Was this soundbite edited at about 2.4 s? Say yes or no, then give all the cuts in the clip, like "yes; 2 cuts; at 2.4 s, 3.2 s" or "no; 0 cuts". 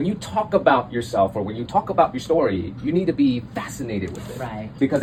no; 0 cuts